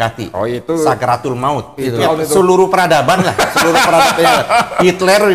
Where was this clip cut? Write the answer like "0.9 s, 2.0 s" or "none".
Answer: 2.0 s